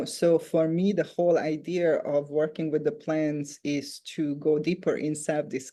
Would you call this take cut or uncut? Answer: uncut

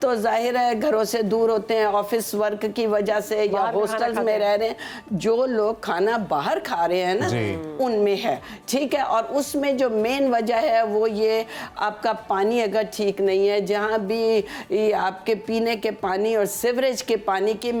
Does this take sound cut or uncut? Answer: uncut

